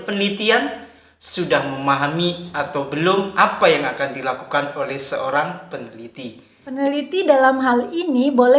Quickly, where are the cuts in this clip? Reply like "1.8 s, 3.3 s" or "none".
6.5 s